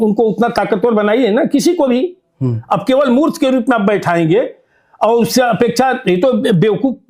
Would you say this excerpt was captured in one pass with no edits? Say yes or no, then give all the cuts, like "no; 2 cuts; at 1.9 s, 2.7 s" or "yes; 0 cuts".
yes; 0 cuts